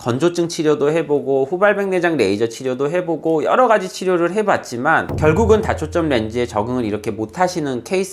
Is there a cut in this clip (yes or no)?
no